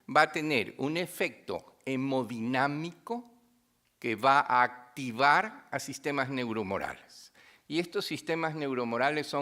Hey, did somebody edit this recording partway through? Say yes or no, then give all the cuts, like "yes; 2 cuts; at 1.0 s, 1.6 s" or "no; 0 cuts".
yes; 1 cut; at 1.1 s